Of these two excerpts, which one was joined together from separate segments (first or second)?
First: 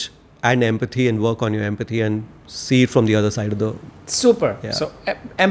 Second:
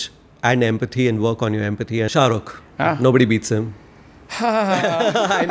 second